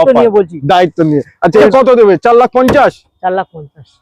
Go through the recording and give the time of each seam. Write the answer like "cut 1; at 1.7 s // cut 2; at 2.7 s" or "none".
cut 1; at 1.7 s